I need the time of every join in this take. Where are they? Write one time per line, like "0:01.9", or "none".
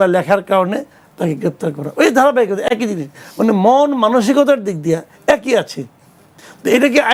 none